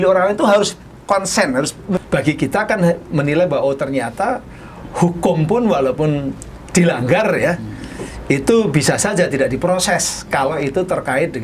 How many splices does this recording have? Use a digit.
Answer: 1